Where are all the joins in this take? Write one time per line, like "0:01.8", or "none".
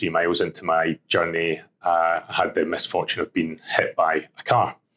none